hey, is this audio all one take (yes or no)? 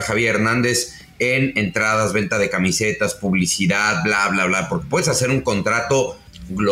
yes